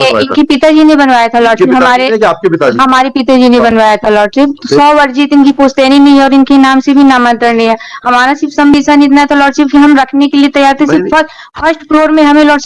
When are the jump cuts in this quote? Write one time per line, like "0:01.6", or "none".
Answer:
none